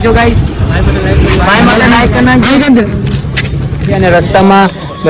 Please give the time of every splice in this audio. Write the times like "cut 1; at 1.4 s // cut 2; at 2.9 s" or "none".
cut 1; at 4.0 s

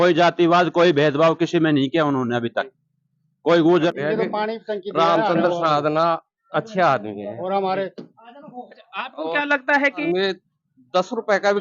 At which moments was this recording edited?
cut 1; at 3.9 s // cut 2; at 10.0 s

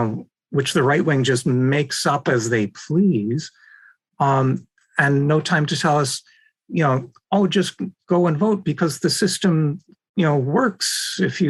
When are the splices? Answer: none

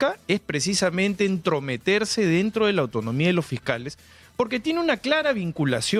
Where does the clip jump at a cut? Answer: none

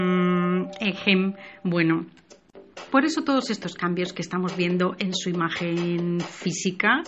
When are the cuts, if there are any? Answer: none

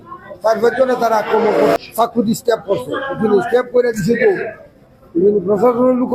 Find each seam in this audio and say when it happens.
cut 1; at 1.8 s

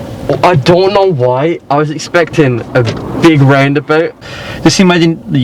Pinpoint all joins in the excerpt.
cut 1; at 4.2 s

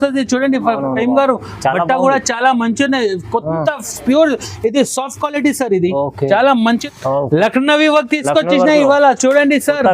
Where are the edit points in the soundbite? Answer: cut 1; at 6.8 s

